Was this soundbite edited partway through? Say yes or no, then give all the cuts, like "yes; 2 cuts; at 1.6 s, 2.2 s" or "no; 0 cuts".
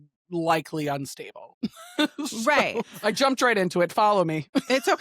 yes; 1 cut; at 2.9 s